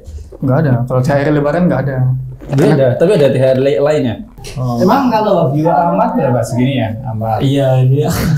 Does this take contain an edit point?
yes; 1 cut; at 4.3 s

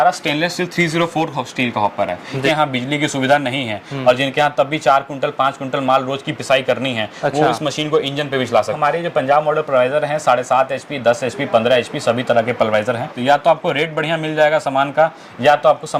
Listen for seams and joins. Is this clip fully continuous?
no; 3 cuts; at 2.4 s, 8.8 s, 13.1 s

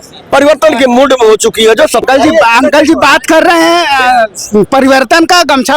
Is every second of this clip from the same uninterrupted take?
no; 1 cut; at 2.0 s

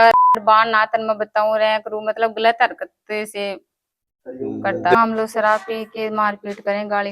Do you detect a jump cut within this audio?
yes; 1 cut; at 5.0 s

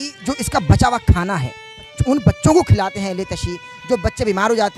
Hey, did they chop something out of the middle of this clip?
yes; 1 cut; at 1.9 s

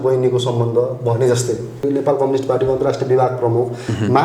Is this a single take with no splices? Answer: no; 1 cut; at 1.8 s

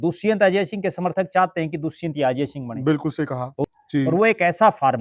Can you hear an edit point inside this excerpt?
yes; 1 cut; at 3.6 s

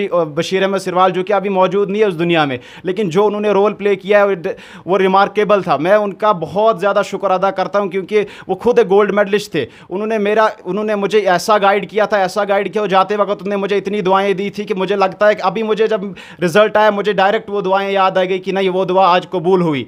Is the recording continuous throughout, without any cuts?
yes; 0 cuts

